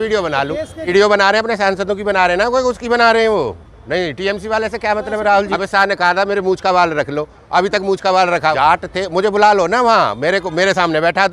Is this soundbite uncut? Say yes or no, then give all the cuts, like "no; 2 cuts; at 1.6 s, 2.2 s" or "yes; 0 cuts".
no; 3 cuts; at 0.9 s, 5.5 s, 8.9 s